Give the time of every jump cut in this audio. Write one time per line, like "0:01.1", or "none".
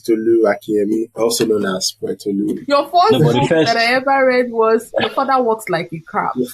0:01.1
0:02.6